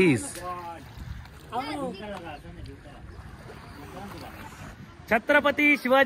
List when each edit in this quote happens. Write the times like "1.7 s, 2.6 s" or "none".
4.8 s